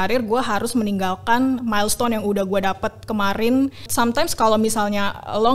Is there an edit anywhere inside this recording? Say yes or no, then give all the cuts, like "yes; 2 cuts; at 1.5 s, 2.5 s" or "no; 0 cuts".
yes; 1 cut; at 3.9 s